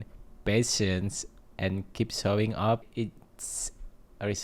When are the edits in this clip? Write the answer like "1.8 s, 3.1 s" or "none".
2.8 s